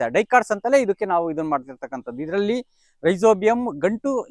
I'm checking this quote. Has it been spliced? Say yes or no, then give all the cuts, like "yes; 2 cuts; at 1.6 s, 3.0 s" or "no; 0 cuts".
no; 0 cuts